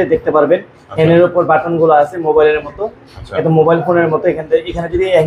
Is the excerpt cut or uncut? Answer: uncut